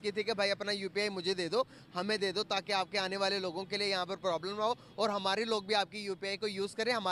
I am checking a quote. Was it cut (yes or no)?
no